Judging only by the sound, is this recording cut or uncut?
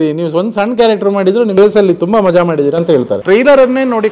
cut